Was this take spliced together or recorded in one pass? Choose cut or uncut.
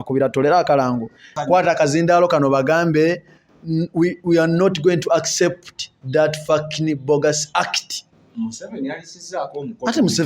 cut